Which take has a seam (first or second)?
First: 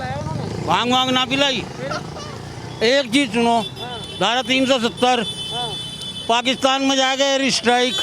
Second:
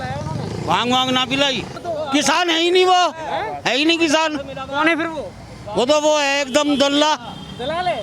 second